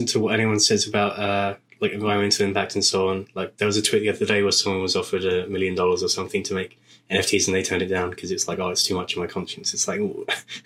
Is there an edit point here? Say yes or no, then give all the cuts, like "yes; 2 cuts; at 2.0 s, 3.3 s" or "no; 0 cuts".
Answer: no; 0 cuts